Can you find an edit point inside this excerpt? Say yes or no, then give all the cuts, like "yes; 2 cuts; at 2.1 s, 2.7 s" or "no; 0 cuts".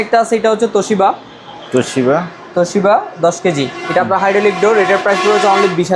no; 0 cuts